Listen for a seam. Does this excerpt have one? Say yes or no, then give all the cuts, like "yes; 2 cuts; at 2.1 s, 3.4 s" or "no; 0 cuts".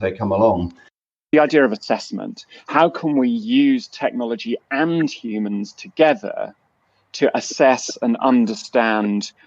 yes; 1 cut; at 1.0 s